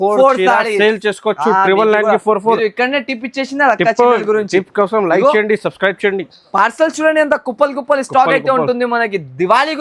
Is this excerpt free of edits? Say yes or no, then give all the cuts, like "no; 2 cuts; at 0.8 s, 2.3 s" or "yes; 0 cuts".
yes; 0 cuts